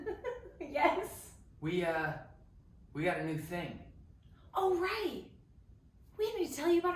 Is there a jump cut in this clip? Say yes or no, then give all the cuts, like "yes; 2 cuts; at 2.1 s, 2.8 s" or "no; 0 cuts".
no; 0 cuts